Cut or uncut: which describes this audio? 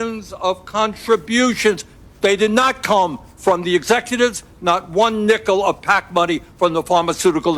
uncut